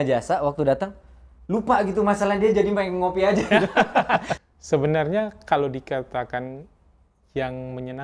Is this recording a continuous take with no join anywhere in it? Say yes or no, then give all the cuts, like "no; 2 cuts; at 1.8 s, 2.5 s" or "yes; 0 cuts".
no; 1 cut; at 4.3 s